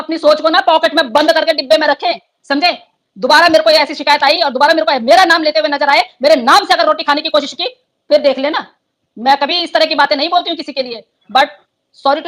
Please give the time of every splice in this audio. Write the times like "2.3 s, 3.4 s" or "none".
none